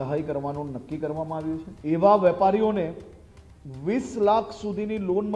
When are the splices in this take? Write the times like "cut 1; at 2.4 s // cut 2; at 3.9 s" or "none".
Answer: cut 1; at 1.7 s